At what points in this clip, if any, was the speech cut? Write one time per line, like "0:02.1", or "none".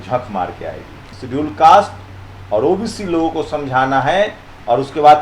0:01.1